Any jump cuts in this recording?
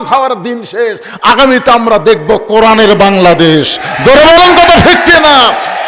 no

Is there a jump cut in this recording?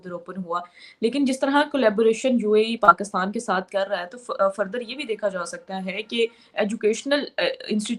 no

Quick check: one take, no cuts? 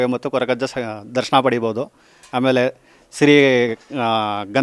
yes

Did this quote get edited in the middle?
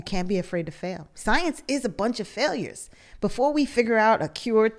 yes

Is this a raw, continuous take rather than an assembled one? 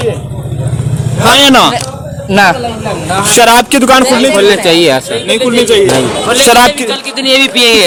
yes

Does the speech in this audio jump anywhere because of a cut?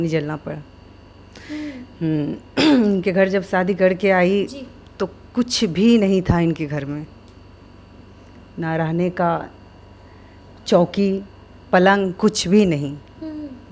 no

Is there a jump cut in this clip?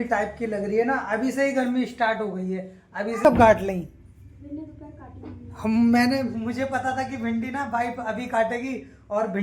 yes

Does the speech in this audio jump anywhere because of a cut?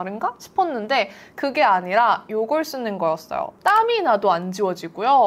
yes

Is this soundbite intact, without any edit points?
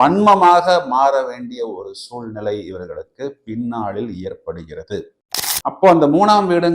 no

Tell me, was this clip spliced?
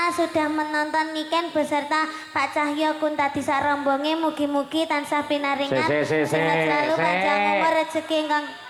no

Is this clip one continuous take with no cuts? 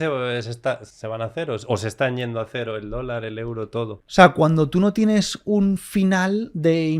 no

